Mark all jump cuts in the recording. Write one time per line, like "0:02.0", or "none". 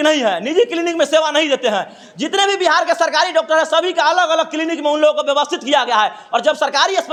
none